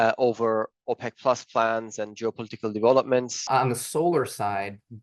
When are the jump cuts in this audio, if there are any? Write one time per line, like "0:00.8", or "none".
0:03.5